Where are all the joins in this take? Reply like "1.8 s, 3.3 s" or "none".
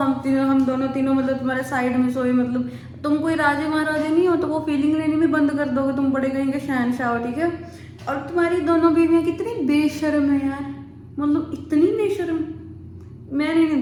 none